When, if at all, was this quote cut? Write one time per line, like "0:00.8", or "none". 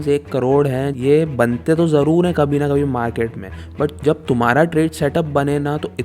0:00.9